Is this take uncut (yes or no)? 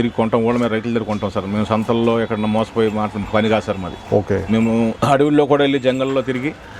yes